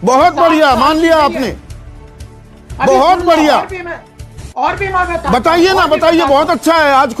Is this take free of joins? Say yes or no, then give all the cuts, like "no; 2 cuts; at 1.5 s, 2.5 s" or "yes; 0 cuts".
yes; 0 cuts